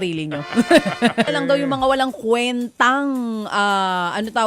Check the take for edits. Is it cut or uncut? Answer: cut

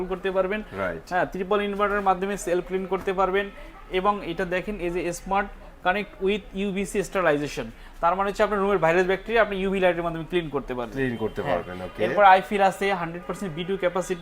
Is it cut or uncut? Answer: uncut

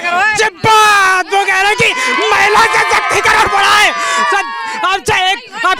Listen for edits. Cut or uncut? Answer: uncut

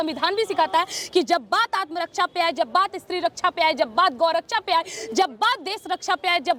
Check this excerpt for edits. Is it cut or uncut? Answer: uncut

